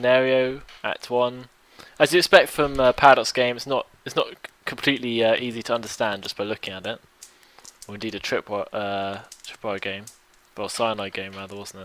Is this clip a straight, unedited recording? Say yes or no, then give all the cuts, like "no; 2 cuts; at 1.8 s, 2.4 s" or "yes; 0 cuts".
yes; 0 cuts